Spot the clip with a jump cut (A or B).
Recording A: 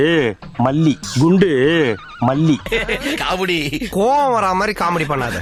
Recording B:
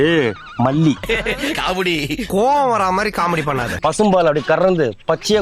B